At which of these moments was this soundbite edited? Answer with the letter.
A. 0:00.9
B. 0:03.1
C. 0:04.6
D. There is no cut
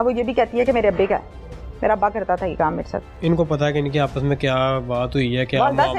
B